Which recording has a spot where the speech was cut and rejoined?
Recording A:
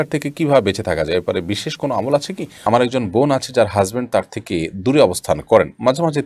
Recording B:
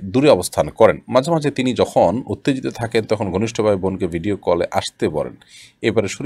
A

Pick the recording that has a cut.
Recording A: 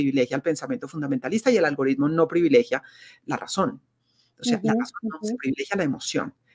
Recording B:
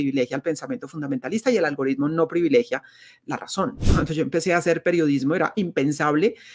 B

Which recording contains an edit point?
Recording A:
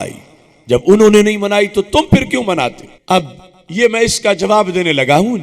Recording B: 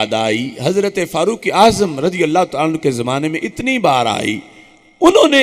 A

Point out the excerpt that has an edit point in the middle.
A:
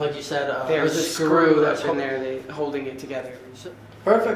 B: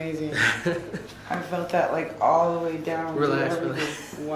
A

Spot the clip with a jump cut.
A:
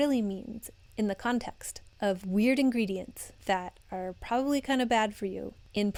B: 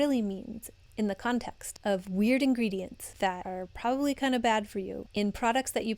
B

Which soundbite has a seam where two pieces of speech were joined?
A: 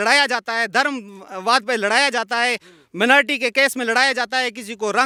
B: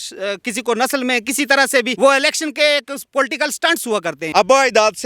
B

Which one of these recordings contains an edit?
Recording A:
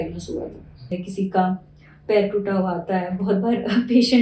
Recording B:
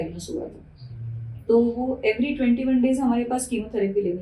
A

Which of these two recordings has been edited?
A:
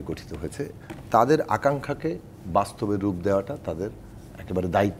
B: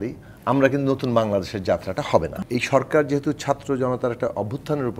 B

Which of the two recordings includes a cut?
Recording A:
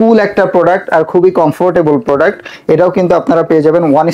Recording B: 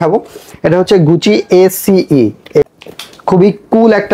B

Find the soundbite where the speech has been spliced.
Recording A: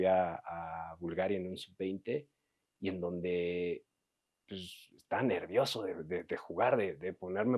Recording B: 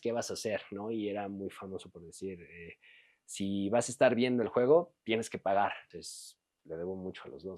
B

